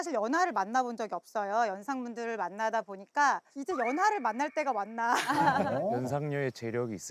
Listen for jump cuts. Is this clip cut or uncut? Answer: cut